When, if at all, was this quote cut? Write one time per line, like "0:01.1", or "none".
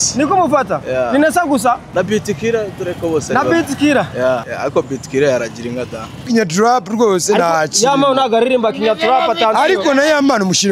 0:01.8
0:04.4
0:06.3

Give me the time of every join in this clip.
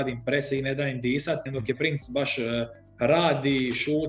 0:01.5

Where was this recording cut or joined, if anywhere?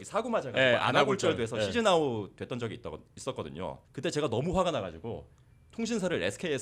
0:03.9

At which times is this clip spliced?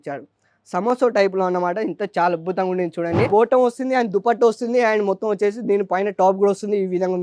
0:03.3

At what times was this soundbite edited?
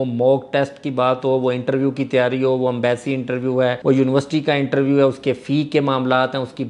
none

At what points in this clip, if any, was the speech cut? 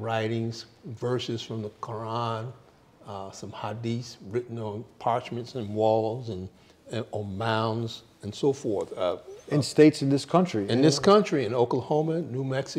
none

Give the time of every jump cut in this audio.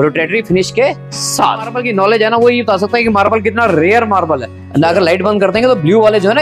0:01.8
0:04.6

